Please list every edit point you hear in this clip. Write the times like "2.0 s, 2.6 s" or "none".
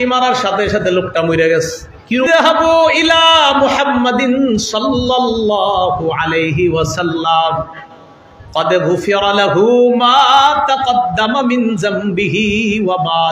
2.3 s